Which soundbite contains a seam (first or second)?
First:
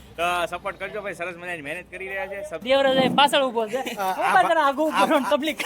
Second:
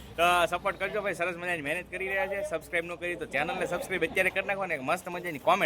first